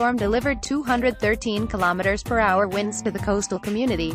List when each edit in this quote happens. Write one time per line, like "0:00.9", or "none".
none